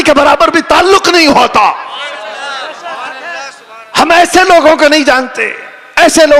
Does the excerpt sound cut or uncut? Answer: uncut